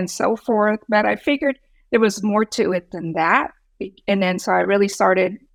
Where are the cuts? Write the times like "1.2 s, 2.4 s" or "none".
none